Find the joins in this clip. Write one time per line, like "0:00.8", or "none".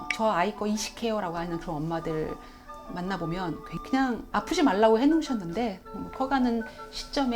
0:03.7